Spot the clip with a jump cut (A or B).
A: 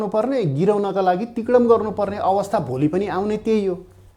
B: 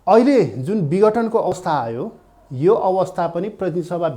B